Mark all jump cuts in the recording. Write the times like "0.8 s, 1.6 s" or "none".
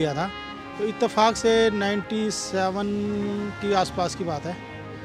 none